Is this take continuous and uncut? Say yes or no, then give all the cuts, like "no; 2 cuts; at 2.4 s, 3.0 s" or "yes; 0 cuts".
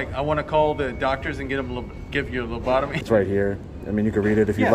no; 1 cut; at 3.0 s